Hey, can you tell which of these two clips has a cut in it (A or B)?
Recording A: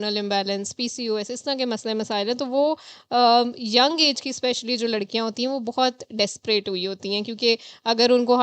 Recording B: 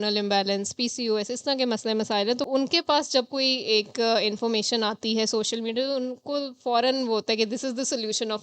B